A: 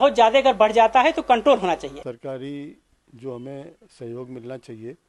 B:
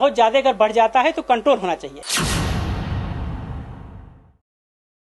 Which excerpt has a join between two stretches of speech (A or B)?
A